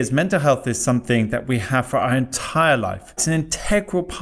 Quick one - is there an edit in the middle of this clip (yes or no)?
yes